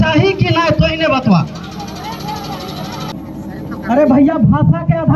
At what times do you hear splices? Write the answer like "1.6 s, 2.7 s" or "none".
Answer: 3.2 s